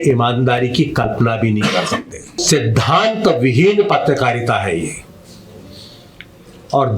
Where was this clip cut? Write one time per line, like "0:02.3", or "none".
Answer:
0:02.4